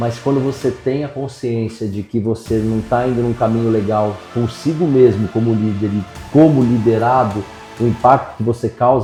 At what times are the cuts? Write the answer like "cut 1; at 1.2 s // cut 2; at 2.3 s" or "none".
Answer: none